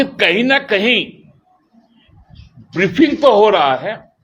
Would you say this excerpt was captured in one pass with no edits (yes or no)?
yes